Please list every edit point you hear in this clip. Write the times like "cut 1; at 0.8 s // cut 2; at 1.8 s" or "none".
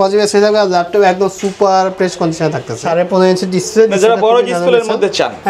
cut 1; at 2.7 s